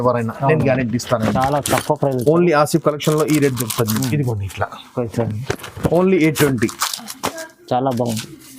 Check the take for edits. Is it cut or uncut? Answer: uncut